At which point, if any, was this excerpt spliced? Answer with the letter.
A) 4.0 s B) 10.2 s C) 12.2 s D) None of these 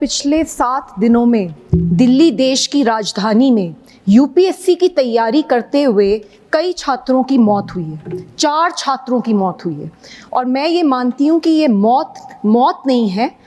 D